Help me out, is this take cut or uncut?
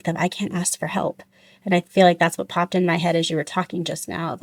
uncut